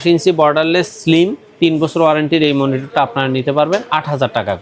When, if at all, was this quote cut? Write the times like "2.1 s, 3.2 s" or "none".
none

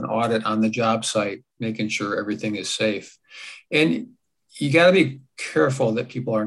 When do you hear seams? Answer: none

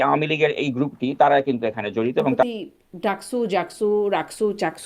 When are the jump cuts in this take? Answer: 2.4 s

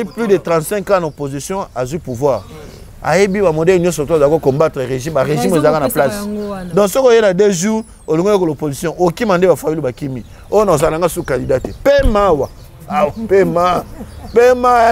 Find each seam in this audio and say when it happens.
none

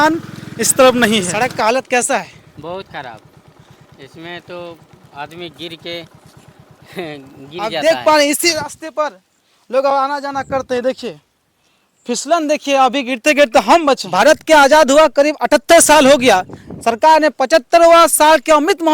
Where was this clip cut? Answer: 1.3 s, 7.7 s, 14.1 s

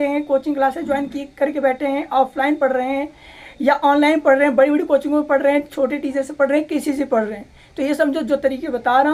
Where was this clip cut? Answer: none

